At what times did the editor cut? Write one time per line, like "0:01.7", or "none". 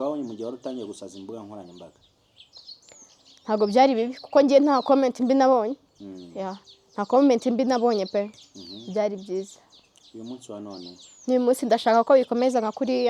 none